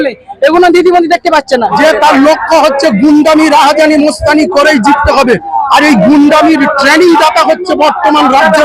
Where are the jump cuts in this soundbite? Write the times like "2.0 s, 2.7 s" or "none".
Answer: 1.7 s